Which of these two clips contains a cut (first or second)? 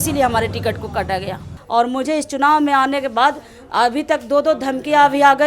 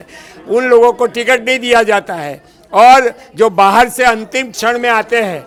first